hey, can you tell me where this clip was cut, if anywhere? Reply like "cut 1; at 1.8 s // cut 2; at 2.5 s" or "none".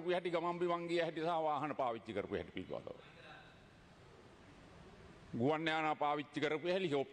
none

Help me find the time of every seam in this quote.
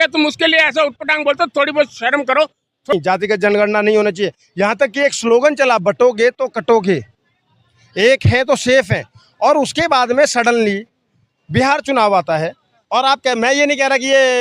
cut 1; at 2.9 s

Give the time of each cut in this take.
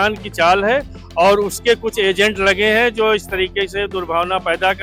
none

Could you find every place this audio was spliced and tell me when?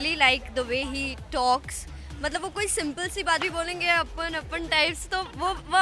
none

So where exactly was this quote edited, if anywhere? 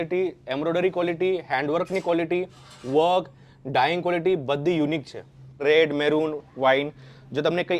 cut 1; at 5.6 s

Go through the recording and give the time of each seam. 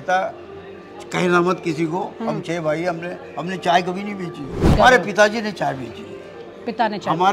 cut 1; at 4.8 s

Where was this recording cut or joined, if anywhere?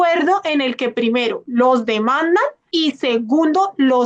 cut 1; at 2.6 s

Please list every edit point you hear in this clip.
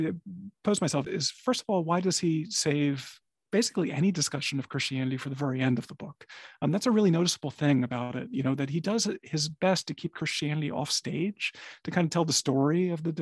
cut 1; at 1.0 s

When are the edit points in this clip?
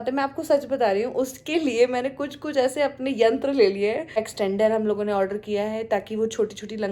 cut 1; at 4.2 s

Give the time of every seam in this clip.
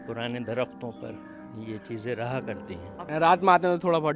cut 1; at 3.0 s

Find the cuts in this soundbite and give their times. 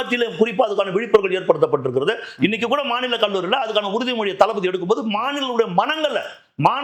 none

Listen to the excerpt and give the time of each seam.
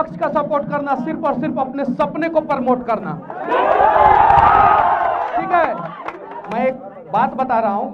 none

